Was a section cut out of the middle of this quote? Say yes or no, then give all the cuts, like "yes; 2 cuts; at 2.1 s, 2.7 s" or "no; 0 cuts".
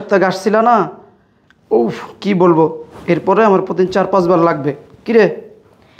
no; 0 cuts